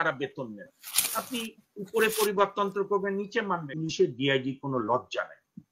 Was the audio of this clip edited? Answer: yes; 1 cut; at 3.7 s

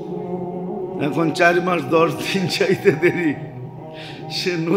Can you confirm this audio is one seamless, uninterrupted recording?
yes; 0 cuts

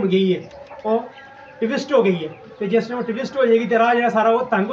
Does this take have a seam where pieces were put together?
no; 0 cuts

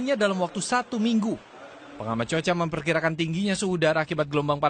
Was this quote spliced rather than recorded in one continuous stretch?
no; 0 cuts

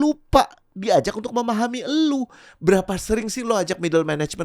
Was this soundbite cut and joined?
no; 0 cuts

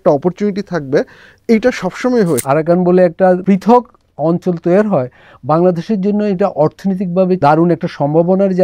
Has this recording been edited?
yes; 3 cuts; at 2.4 s, 3.4 s, 7.4 s

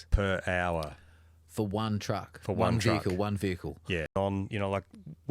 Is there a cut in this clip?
yes; 1 cut; at 4.2 s

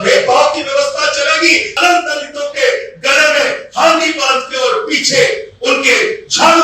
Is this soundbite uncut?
no; 1 cut; at 1.7 s

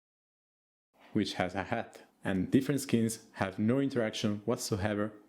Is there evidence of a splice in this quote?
yes; 1 cut; at 2.0 s

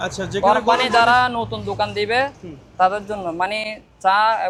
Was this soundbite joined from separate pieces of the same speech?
no; 0 cuts

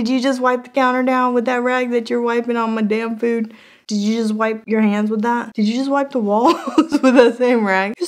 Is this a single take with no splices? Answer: yes; 0 cuts

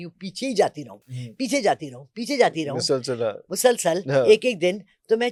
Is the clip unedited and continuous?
yes; 0 cuts

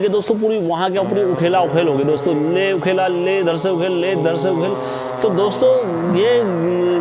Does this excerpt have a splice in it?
no; 0 cuts

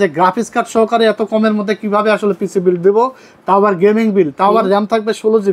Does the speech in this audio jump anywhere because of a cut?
no; 0 cuts

